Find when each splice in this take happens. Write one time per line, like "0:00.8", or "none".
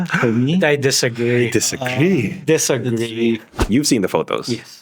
0:03.5